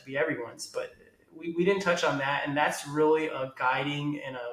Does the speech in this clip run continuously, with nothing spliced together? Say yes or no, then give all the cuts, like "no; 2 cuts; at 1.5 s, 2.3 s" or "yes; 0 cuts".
yes; 0 cuts